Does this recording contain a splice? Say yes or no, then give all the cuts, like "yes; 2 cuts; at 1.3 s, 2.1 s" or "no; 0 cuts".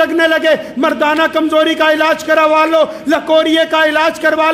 no; 0 cuts